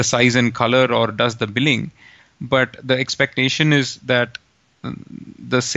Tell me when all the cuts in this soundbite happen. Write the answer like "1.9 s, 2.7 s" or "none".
none